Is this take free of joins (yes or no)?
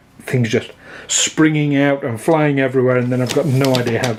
yes